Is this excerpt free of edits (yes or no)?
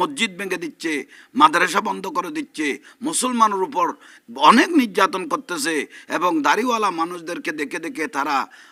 yes